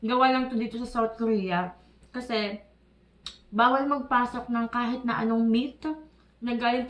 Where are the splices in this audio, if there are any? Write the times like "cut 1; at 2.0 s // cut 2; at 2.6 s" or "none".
none